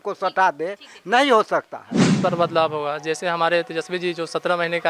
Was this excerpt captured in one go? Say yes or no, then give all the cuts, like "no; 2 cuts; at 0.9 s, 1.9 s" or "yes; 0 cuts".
no; 1 cut; at 2.2 s